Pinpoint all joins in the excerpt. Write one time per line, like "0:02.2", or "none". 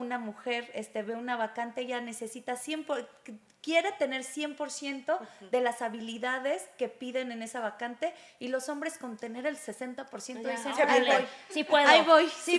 none